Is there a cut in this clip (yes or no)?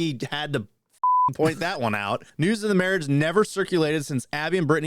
yes